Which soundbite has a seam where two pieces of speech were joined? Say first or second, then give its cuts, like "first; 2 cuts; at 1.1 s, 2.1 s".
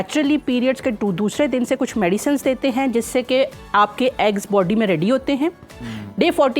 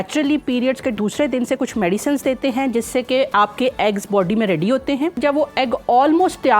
second; 3 cuts; at 1.0 s, 3.3 s, 5.2 s